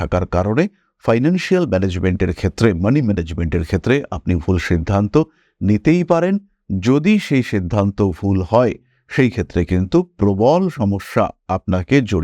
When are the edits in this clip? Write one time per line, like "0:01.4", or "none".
none